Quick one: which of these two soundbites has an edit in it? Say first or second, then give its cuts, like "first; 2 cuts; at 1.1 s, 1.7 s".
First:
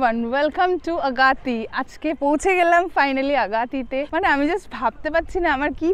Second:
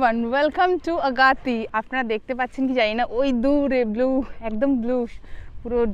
second; 1 cut; at 1.7 s